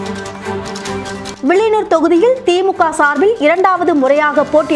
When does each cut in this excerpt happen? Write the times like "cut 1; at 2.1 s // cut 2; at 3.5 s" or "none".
cut 1; at 1.2 s

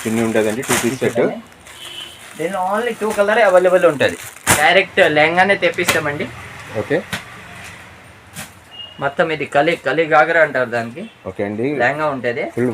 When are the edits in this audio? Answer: cut 1; at 4.6 s

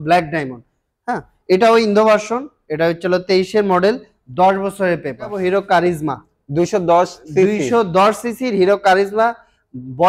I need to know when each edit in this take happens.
cut 1; at 5.4 s

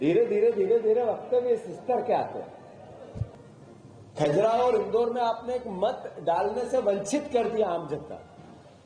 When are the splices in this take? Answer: cut 1; at 3.3 s

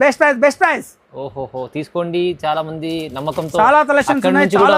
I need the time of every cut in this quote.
none

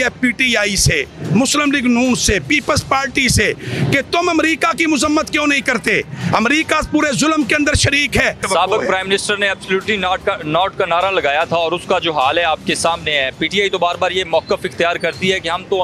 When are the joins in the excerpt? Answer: cut 1; at 8.4 s

